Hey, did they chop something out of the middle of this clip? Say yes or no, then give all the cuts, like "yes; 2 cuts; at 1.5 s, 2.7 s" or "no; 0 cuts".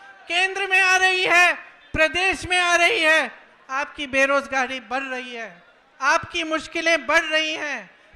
no; 0 cuts